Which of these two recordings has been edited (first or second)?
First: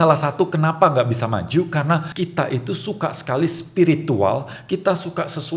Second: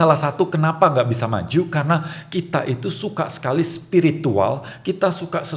first